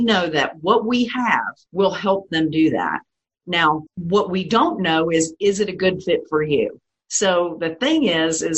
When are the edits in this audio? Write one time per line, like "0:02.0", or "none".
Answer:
0:01.6
0:03.9